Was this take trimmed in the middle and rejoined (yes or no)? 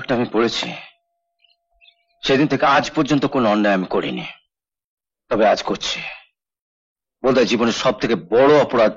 no